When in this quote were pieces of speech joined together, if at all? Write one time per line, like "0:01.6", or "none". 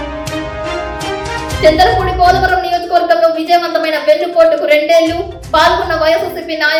none